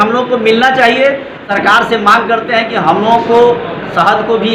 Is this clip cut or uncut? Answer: cut